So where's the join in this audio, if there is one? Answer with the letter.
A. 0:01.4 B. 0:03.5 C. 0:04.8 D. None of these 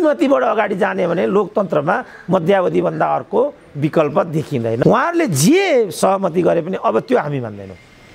C